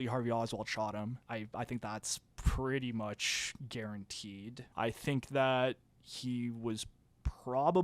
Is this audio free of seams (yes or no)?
no